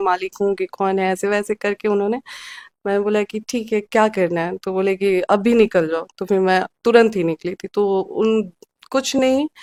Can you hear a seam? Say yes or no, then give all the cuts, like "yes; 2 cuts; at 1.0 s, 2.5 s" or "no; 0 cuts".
no; 0 cuts